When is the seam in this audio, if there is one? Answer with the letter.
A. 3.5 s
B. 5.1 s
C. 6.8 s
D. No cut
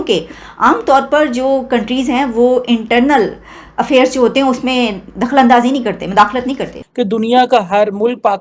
C